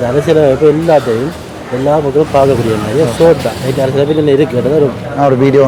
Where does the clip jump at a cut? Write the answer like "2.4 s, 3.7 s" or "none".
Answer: none

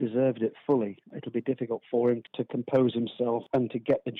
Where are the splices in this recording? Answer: 1.1 s, 2.2 s, 3.4 s

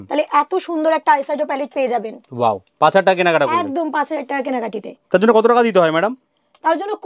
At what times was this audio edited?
none

